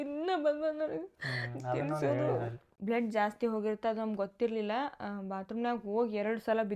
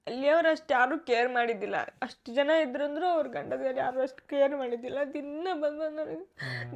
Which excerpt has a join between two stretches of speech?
first; 1 cut; at 2.6 s

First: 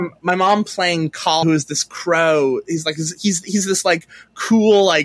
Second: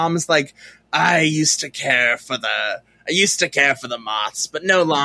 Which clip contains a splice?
first; 1 cut; at 1.4 s

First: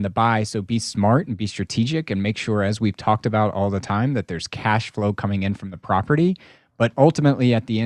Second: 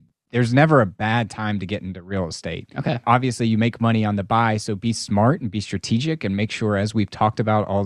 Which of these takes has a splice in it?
second; 1 cut; at 3.0 s

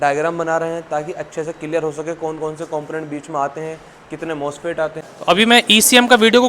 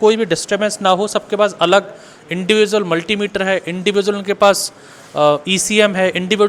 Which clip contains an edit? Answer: first; 1 cut; at 5.1 s

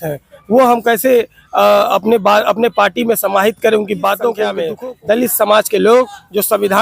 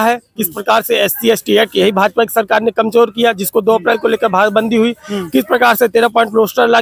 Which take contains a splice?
first; 1 cut; at 4.7 s

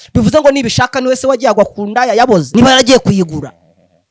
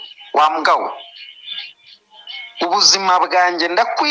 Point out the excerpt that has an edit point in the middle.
first; 1 cut; at 2.5 s

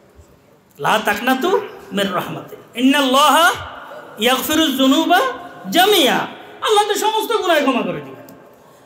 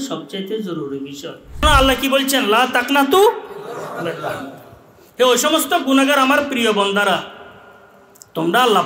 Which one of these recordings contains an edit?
second; 1 cut; at 1.6 s

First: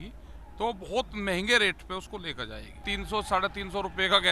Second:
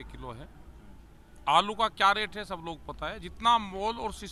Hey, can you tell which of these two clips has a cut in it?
first; 1 cut; at 2.8 s

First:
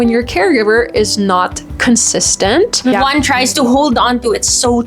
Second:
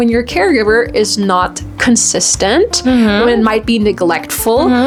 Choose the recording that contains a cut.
first; 1 cut; at 2.9 s

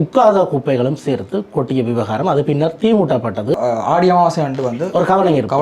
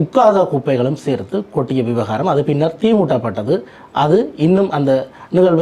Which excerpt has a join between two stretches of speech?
first; 1 cut; at 3.6 s

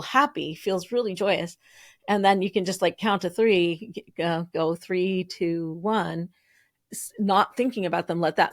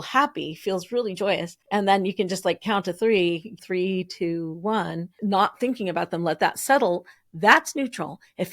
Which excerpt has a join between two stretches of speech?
second; 3 cuts; at 1.5 s, 3.6 s, 5.1 s

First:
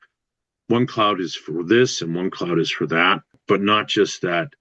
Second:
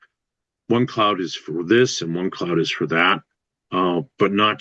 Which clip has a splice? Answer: first; 1 cut; at 3.4 s

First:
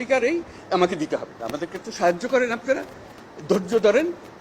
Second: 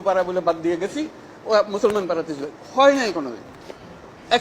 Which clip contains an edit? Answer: first; 1 cut; at 1.4 s

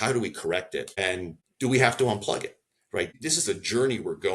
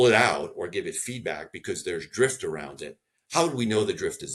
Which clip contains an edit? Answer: first; 2 cuts; at 1.3 s, 3.1 s

